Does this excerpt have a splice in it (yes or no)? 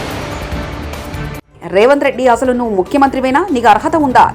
yes